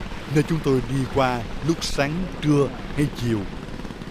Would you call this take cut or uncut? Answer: uncut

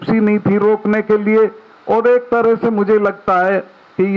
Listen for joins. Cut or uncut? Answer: uncut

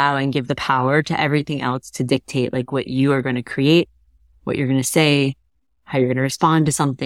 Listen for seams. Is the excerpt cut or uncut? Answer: uncut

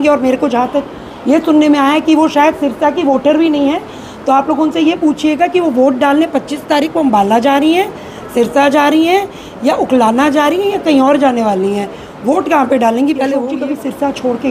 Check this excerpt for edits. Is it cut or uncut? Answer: cut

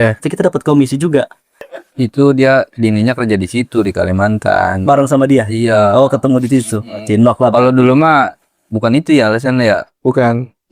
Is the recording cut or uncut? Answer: cut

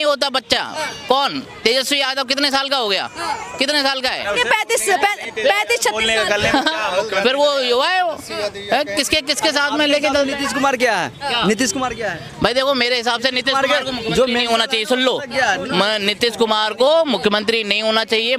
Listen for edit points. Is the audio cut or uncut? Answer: uncut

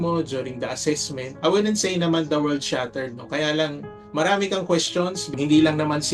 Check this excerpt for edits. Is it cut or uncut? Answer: cut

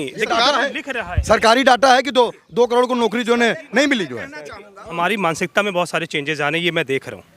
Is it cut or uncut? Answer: cut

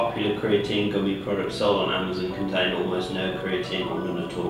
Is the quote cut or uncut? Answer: uncut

